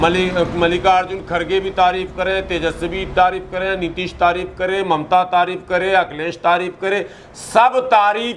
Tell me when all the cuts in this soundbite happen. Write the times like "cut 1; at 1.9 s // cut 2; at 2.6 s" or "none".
none